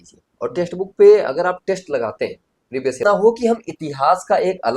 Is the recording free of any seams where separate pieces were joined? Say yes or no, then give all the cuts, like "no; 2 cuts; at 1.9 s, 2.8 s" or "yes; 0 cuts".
no; 1 cut; at 3.0 s